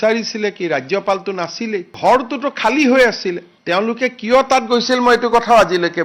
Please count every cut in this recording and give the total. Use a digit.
2